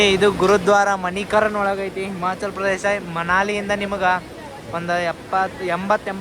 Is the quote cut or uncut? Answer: uncut